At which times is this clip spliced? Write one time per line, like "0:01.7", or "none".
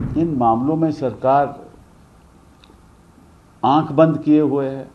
none

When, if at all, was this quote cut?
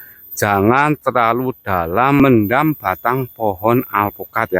0:02.2

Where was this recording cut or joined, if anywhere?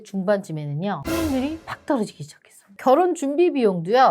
0:01.7
0:02.8

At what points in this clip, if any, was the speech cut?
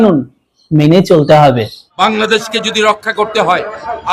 0:01.8

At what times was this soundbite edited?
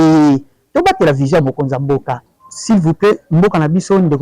0:02.3

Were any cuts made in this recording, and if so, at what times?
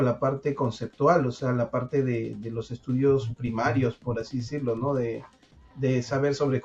none

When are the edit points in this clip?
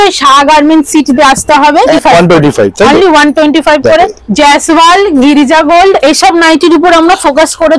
0:01.9
0:04.2

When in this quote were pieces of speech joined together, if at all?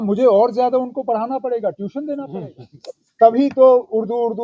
0:02.3

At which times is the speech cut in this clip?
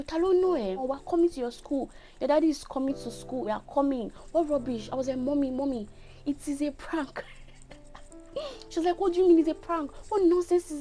0:00.8
0:03.5

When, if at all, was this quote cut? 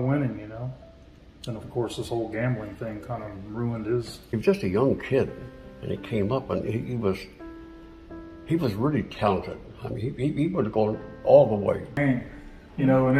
0:04.2
0:12.0

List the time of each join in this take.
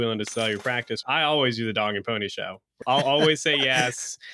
0:01.0
0:02.7

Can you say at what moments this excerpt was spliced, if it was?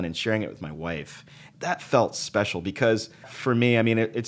0:01.5
0:03.3

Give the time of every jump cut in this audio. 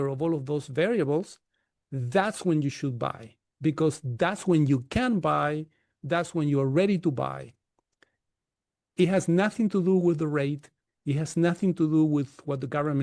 none

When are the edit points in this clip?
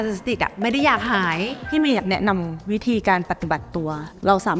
0:01.6

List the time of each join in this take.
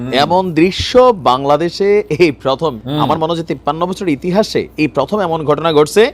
0:02.8

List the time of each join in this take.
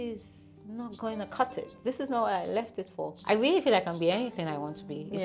0:03.2

